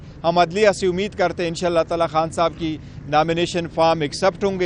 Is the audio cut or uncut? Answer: uncut